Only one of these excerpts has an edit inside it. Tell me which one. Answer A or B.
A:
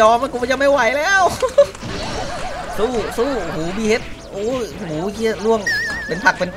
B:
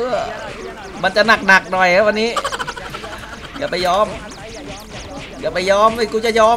B